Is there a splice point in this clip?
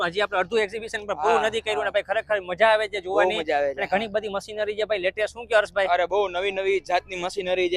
no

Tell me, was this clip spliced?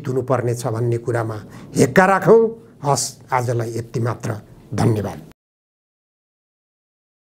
no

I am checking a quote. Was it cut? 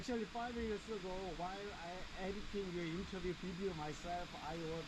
no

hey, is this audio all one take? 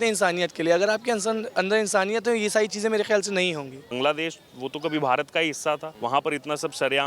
no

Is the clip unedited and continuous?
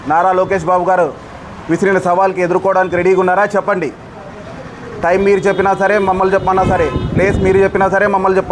yes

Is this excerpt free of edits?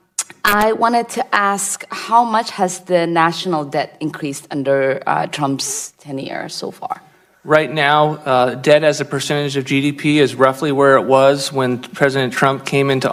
yes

